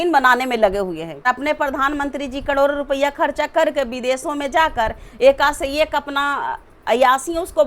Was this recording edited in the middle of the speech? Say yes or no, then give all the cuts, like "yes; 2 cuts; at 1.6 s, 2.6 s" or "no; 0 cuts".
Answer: yes; 1 cut; at 1.3 s